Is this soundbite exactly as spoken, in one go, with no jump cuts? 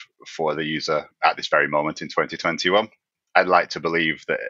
no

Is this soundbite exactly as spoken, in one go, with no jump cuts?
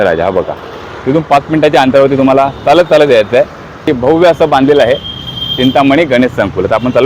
no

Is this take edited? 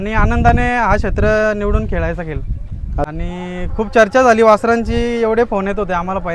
yes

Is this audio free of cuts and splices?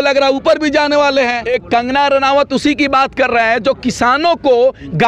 no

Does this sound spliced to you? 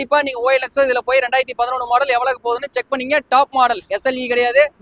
no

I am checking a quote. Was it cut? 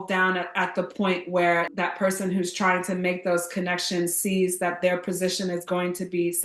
no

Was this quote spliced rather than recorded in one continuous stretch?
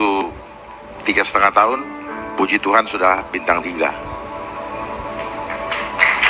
no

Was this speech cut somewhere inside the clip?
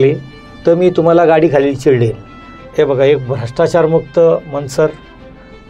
yes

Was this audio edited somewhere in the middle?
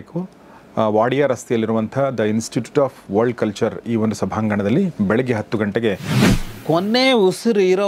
yes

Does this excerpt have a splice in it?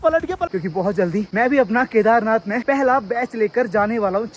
yes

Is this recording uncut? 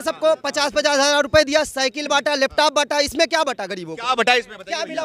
yes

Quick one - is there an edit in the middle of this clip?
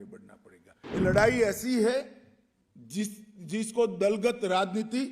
yes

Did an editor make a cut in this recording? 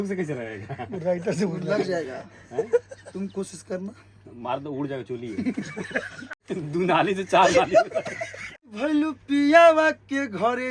yes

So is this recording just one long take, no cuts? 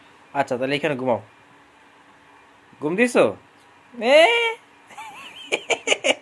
yes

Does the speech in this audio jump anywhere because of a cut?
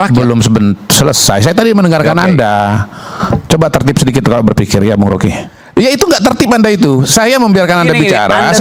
no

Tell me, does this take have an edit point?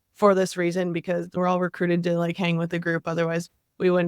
yes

